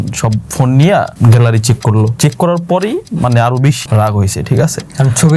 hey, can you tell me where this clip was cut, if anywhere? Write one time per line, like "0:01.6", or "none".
0:01.1
0:02.1
0:03.8